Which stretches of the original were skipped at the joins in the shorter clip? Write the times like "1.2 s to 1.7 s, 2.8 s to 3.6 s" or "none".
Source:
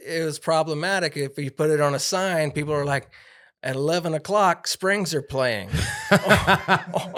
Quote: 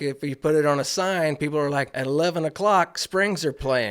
3.1 s to 3.6 s